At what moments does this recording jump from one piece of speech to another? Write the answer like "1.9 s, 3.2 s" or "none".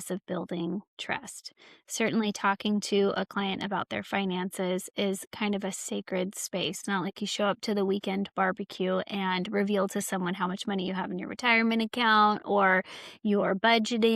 6.8 s